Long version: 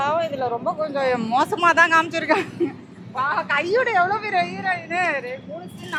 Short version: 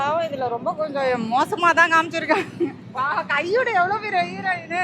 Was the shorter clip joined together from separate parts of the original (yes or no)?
yes